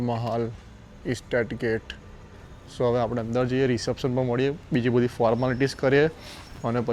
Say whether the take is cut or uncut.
uncut